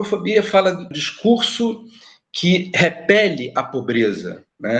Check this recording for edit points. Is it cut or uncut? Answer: cut